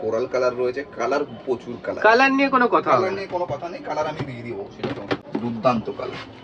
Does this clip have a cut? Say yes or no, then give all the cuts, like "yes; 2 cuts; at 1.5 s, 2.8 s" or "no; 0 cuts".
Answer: yes; 1 cut; at 5.2 s